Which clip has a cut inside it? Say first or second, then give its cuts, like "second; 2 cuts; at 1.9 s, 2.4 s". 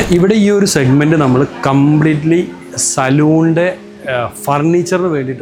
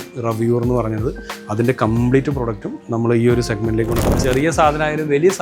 second; 1 cut; at 4.0 s